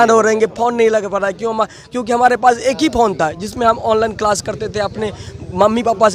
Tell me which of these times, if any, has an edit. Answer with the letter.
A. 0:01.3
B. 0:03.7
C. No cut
C